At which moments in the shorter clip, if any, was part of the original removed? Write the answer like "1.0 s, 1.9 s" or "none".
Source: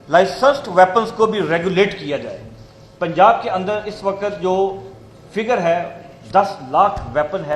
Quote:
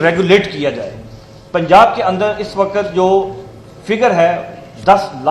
none